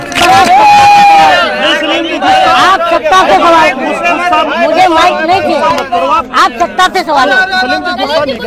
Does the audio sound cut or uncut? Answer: uncut